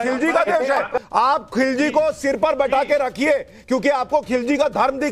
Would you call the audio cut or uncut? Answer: cut